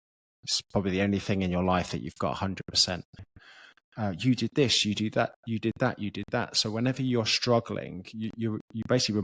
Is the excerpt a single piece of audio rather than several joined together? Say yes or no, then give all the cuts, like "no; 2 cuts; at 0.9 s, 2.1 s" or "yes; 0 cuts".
no; 1 cut; at 3.3 s